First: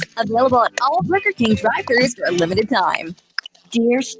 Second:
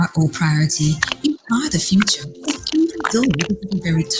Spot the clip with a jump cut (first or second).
first